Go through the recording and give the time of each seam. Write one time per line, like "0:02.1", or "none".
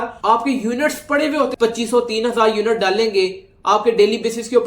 0:01.5